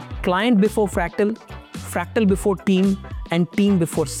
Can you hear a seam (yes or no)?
no